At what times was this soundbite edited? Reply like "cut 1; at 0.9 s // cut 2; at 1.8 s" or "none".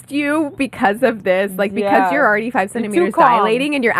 none